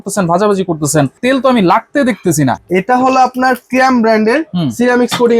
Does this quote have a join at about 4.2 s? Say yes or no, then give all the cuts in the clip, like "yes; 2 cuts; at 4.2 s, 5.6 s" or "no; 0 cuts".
no; 2 cuts; at 1.2 s, 2.6 s